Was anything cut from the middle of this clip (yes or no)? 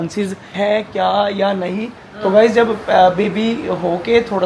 no